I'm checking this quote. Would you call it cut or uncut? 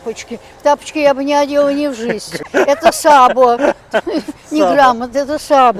uncut